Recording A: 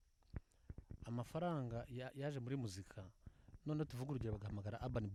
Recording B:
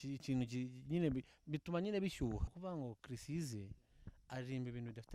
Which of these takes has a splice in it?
B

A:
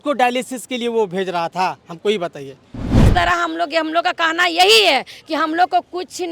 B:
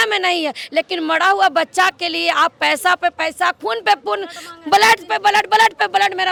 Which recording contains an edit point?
A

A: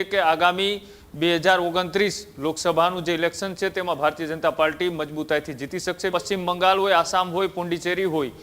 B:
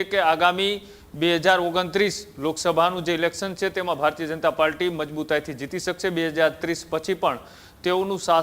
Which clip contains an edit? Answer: A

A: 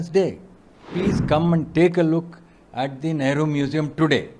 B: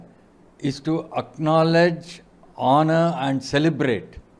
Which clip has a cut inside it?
A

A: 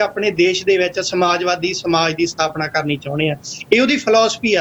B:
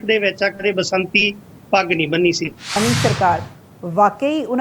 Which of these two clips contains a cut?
B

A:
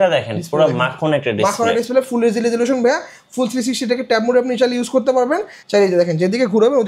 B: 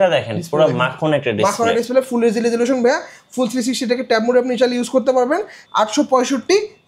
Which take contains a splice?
B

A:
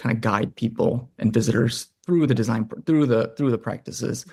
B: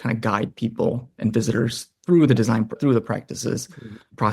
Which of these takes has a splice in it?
B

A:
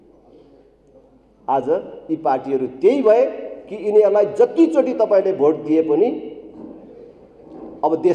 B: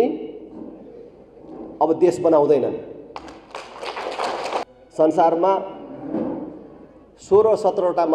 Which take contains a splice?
B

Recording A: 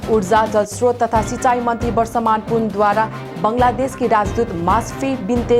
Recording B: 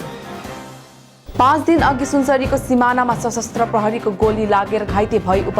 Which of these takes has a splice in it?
B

